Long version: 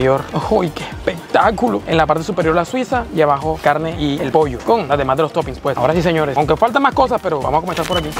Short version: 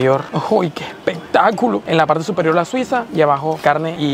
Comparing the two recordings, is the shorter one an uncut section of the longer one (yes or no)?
yes